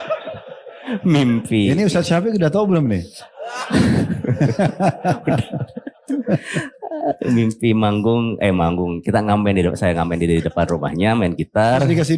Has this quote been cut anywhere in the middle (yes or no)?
no